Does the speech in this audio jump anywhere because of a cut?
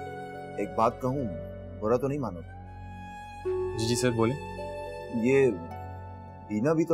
no; 0 cuts

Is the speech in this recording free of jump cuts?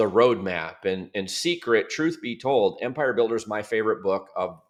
yes; 0 cuts

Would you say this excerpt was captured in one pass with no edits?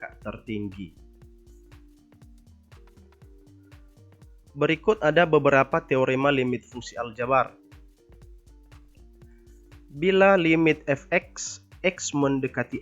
no; 4 cuts; at 1.0 s, 4.5 s, 7.5 s, 9.9 s

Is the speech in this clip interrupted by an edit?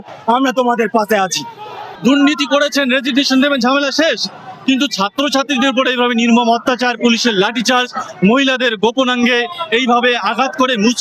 yes; 1 cut; at 1.8 s

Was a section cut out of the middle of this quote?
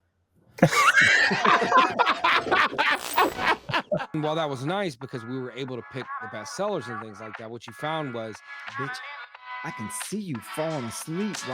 yes; 1 cut; at 4.1 s

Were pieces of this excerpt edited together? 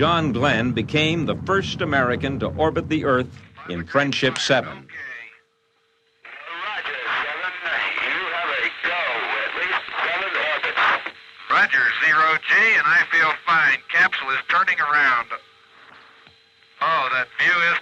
no; 0 cuts

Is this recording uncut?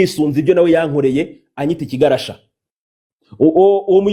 yes; 0 cuts

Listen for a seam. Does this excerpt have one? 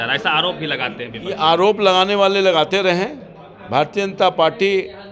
no; 0 cuts

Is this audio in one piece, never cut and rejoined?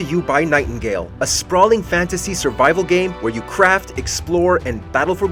yes; 0 cuts

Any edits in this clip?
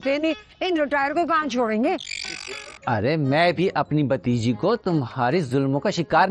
yes; 1 cut; at 2.7 s

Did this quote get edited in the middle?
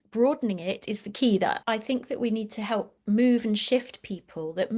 yes; 1 cut; at 1.6 s

